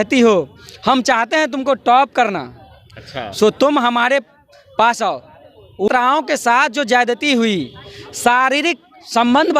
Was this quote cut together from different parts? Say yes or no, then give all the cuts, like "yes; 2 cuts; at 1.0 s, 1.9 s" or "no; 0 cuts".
yes; 1 cut; at 5.9 s